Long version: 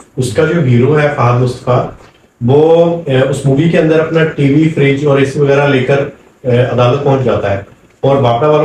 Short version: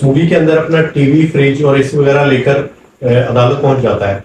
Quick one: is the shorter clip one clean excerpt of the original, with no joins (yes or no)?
yes